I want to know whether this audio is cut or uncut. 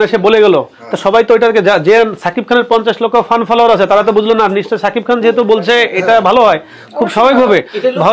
uncut